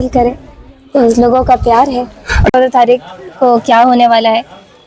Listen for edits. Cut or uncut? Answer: cut